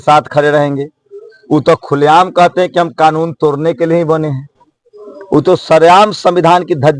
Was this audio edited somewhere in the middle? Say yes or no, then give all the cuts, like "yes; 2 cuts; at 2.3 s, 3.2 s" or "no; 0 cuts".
no; 0 cuts